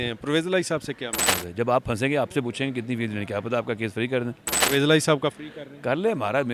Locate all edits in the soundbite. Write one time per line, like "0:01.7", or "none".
0:01.3
0:04.6